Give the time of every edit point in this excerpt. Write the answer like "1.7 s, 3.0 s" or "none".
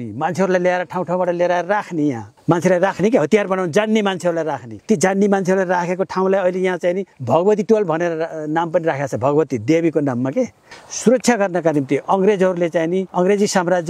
2.3 s, 4.7 s, 7.1 s, 10.6 s, 13.1 s